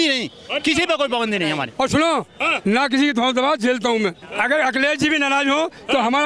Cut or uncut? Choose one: cut